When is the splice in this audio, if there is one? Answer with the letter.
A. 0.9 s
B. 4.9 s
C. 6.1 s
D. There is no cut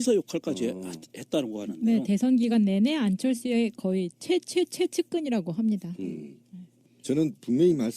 A